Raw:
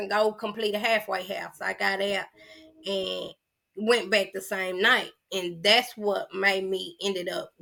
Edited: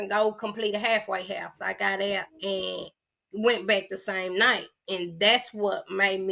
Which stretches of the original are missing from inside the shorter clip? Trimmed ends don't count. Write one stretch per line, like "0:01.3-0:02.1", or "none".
0:02.3-0:02.8